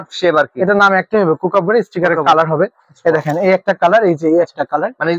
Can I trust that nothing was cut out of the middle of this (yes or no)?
yes